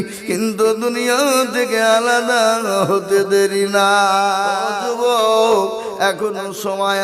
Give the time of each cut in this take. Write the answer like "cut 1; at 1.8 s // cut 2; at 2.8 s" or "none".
cut 1; at 4.7 s